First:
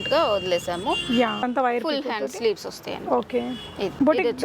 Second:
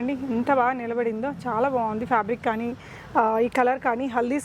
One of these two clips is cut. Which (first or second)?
first